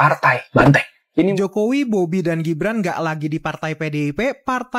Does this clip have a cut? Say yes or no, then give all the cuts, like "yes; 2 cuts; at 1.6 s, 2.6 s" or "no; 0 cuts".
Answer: yes; 1 cut; at 1.3 s